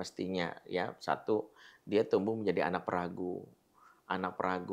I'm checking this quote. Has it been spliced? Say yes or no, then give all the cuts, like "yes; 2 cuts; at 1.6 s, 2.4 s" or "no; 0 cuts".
no; 0 cuts